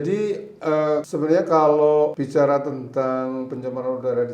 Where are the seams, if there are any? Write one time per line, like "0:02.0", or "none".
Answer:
0:01.1
0:02.2